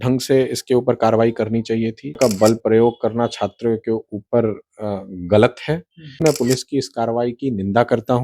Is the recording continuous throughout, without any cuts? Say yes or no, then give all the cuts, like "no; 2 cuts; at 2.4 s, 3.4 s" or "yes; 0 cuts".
no; 2 cuts; at 2.2 s, 6.2 s